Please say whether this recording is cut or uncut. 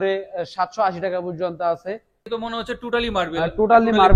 cut